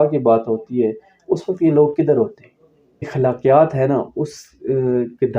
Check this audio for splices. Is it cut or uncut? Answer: cut